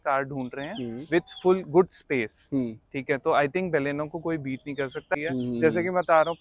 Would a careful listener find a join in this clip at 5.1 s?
yes; 1 cut; at 5.1 s

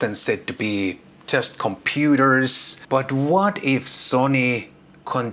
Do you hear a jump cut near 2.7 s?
yes; 1 cut; at 2.7 s

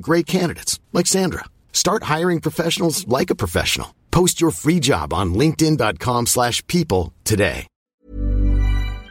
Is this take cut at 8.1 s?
yes; 1 cut; at 8.1 s

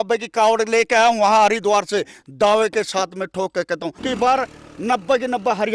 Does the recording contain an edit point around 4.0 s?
yes; 1 cut; at 4.0 s

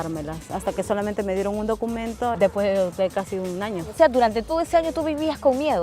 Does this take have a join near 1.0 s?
no; 2 cuts; at 2.4 s, 3.9 s

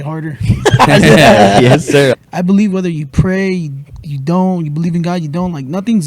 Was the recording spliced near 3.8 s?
no; 1 cut; at 2.2 s

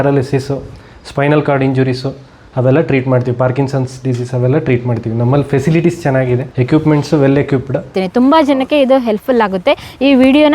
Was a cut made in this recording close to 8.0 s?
yes; 2 cuts; at 6.5 s, 8.0 s

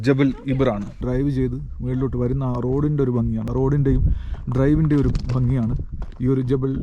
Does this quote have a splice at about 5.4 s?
no; 2 cuts; at 1.0 s, 3.5 s

